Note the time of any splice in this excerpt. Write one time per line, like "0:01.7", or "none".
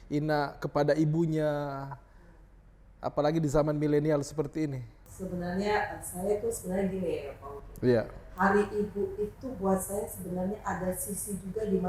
none